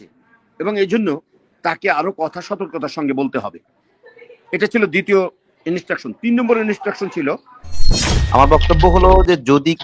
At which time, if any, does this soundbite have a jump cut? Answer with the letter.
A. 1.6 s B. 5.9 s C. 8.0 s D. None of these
C